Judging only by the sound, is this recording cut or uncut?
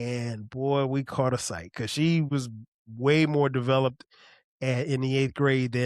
cut